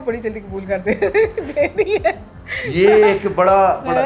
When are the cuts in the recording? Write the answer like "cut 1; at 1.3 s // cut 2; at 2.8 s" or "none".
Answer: none